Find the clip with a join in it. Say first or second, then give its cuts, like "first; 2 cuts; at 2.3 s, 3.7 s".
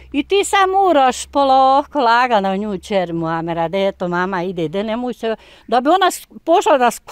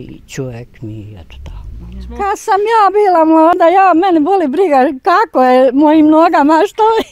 second; 1 cut; at 2.1 s